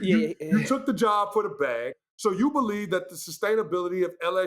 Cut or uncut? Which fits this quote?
cut